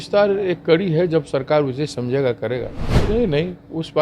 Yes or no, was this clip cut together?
yes